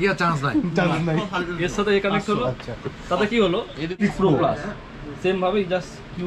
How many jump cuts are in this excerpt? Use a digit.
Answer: 1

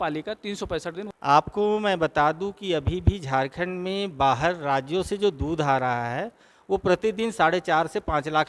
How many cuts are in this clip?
1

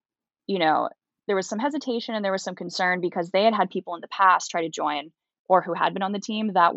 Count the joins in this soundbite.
1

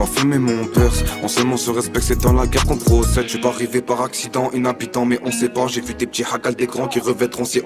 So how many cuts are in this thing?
0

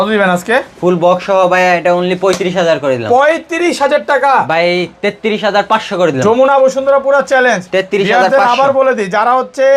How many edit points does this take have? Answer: 0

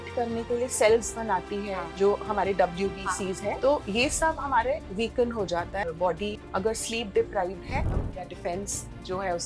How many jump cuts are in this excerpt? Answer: 4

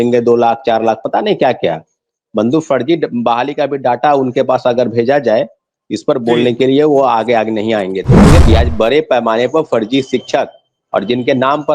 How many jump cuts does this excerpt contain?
1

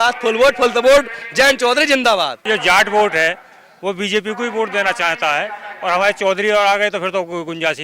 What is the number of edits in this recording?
1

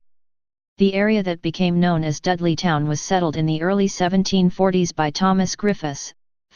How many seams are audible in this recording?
1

